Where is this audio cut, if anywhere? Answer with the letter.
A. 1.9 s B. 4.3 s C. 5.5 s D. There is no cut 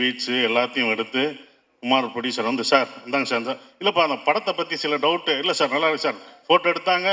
D